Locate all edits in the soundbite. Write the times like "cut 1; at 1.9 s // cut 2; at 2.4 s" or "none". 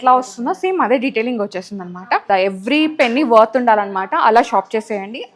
cut 1; at 2.3 s